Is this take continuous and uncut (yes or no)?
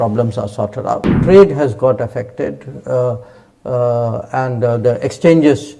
no